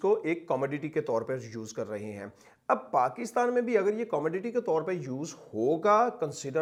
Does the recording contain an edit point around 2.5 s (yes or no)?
no